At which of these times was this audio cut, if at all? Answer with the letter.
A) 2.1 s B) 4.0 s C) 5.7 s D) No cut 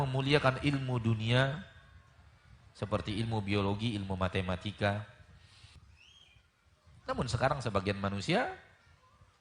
C